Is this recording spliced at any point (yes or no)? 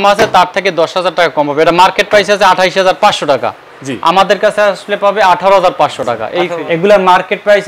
yes